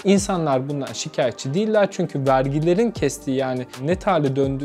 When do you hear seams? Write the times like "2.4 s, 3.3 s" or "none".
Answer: 3.8 s